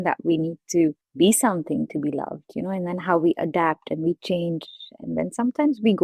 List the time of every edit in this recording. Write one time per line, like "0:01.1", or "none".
0:01.0